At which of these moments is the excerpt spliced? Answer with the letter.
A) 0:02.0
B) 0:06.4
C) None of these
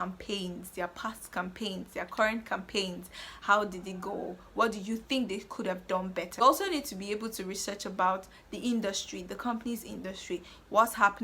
B